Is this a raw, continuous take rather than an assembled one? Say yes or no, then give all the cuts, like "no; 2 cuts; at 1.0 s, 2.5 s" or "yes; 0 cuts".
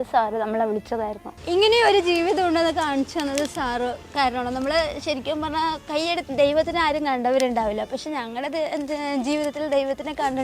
no; 2 cuts; at 1.3 s, 4.1 s